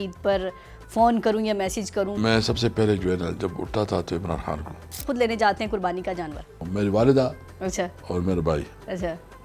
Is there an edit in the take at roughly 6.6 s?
yes; 3 cuts; at 2.2 s, 5.0 s, 6.6 s

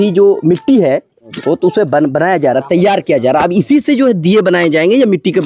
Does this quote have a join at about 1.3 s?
yes; 1 cut; at 1.3 s

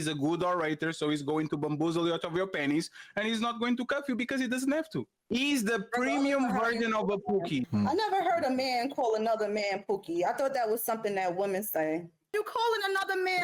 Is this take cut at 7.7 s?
yes; 3 cuts; at 5.1 s, 7.7 s, 12.3 s

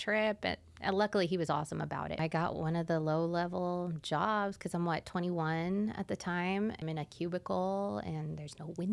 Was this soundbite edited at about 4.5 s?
no; 2 cuts; at 2.2 s, 6.8 s

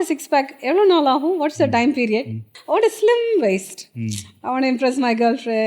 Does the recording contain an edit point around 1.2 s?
no; 1 cut; at 2.5 s

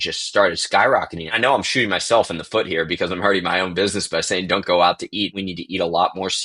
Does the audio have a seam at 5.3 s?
yes; 2 cuts; at 1.3 s, 5.3 s

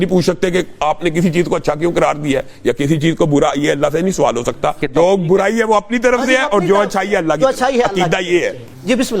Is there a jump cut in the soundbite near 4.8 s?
yes; 1 cut; at 4.8 s

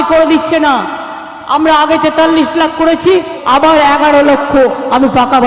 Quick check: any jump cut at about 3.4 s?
yes; 1 cut; at 3.4 s

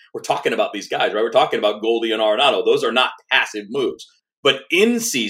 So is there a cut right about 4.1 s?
yes; 1 cut; at 4.1 s

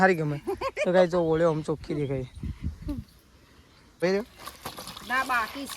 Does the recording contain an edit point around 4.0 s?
yes; 1 cut; at 4.0 s

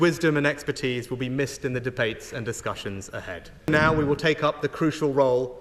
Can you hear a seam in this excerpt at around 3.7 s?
yes; 1 cut; at 3.7 s

